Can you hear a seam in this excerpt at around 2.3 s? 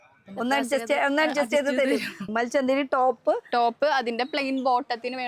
yes; 1 cut; at 2.3 s

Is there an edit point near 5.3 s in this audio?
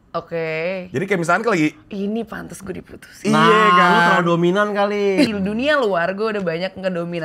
yes; 1 cut; at 5.3 s

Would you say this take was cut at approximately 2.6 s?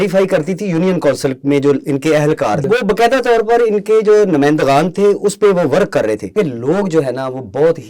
yes; 2 cuts; at 2.6 s, 6.4 s

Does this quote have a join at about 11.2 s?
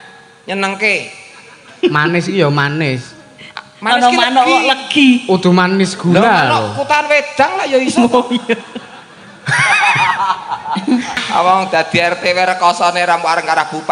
yes; 1 cut; at 11.2 s

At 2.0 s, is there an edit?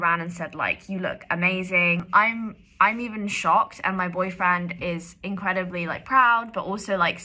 yes; 1 cut; at 2.0 s

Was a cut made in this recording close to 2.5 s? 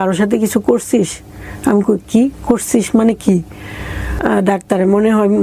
no; 1 cut; at 4.2 s

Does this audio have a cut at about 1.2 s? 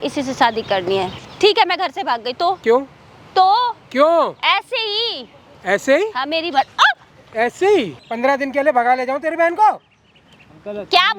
yes; 2 cuts; at 1.2 s, 8.0 s

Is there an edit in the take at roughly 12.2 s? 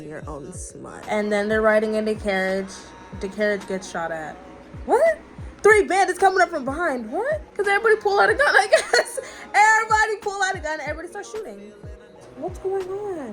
yes; 3 cuts; at 1.0 s, 7.5 s, 12.2 s

